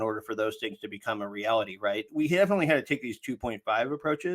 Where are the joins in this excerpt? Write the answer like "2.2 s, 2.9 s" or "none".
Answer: 2.0 s